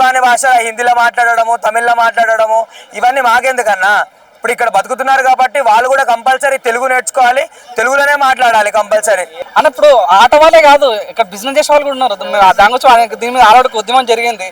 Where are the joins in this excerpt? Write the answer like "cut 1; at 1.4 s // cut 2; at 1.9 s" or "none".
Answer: none